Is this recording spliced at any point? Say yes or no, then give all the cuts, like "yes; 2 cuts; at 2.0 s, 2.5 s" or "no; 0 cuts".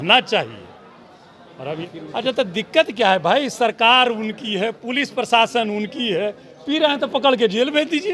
yes; 1 cut; at 1.8 s